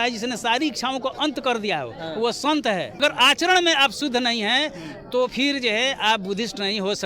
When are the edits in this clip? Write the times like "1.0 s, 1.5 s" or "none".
2.9 s